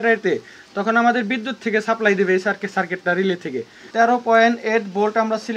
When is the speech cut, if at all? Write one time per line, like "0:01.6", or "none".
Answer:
0:03.8